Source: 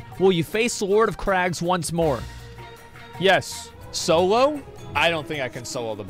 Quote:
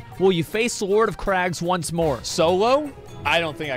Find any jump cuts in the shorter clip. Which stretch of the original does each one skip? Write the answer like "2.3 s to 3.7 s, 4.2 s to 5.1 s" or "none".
2.2 s to 3.9 s